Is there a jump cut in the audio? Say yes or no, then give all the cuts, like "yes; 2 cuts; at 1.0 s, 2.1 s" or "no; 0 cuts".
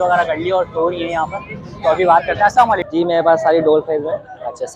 yes; 1 cut; at 2.8 s